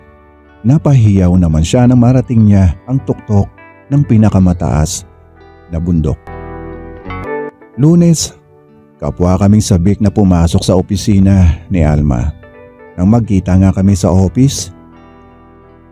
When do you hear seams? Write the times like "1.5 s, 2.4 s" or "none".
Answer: 7.2 s